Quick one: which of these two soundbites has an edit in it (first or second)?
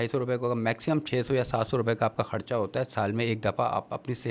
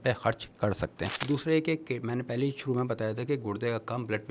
second